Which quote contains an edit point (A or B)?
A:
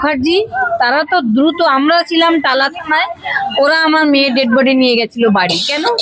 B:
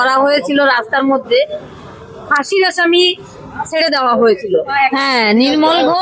B